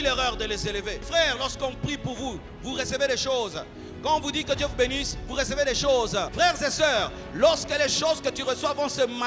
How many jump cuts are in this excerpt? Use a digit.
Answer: 2